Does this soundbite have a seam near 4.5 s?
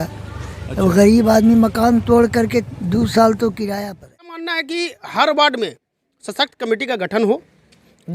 yes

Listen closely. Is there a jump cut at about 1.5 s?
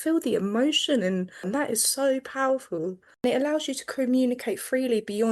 yes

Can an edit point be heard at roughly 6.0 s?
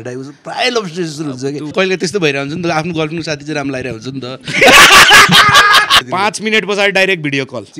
yes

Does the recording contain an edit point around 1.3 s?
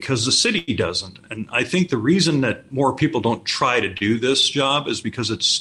no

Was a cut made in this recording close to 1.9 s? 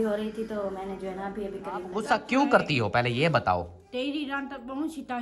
yes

